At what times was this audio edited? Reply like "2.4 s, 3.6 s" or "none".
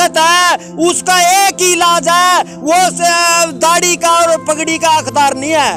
none